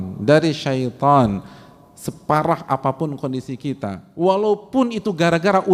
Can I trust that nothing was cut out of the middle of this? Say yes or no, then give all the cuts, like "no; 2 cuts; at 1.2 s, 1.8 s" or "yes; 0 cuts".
yes; 0 cuts